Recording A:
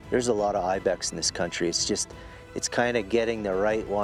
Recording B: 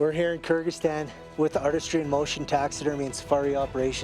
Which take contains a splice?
B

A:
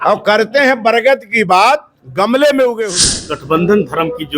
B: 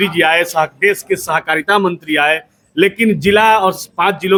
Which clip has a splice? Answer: A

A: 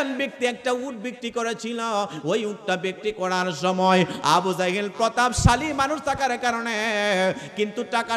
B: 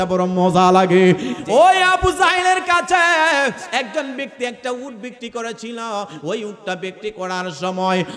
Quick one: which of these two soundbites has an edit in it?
B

